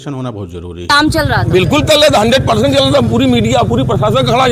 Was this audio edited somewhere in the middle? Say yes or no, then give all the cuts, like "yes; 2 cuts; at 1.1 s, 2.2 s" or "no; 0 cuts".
yes; 1 cut; at 0.9 s